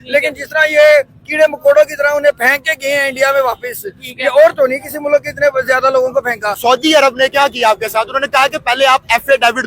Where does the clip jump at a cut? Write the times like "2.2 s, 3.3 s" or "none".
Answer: 6.5 s